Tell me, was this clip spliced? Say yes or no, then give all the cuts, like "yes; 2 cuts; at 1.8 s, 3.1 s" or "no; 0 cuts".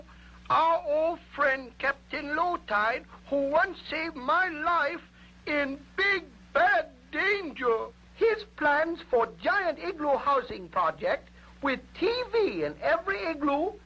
yes; 1 cut; at 1.1 s